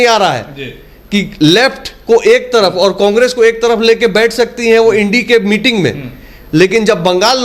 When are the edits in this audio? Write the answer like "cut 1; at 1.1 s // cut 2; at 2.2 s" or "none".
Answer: none